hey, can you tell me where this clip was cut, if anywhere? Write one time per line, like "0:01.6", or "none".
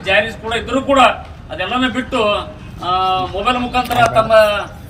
none